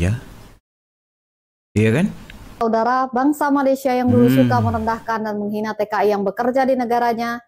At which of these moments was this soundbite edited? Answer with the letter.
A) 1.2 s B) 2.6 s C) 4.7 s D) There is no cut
B